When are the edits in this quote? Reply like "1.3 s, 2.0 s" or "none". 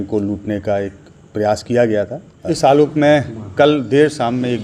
2.4 s